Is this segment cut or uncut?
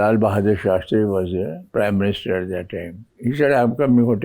cut